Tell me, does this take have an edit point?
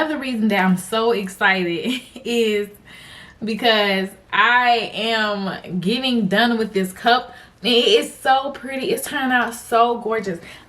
no; 0 cuts

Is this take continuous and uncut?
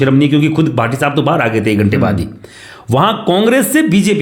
yes; 0 cuts

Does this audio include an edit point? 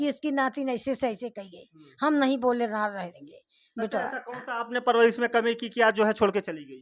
no; 0 cuts

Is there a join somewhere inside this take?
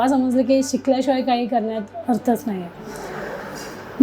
no; 0 cuts

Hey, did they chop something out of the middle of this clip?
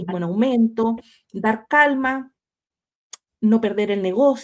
no; 0 cuts

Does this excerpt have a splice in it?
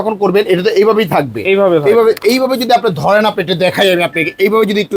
no; 0 cuts

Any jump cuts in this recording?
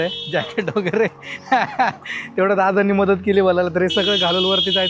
no; 0 cuts

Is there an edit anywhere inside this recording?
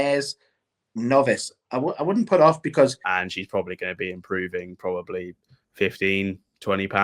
yes; 1 cut; at 3.1 s

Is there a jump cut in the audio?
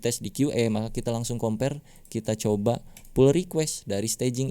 no; 0 cuts

